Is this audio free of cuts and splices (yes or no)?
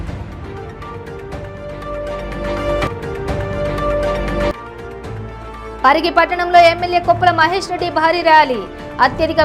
no